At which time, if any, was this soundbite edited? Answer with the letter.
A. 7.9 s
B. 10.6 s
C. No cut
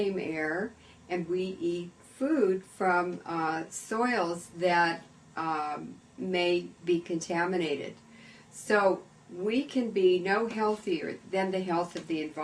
B